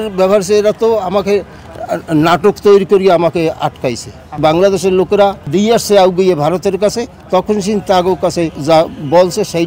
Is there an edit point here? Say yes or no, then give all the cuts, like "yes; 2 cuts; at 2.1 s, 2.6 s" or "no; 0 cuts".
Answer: yes; 3 cuts; at 4.4 s, 5.4 s, 8.6 s